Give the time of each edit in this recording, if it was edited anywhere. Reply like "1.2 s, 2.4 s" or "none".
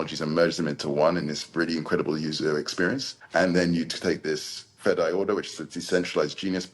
3.1 s